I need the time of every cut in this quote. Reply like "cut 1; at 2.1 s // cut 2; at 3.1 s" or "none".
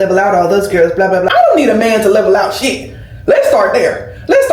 none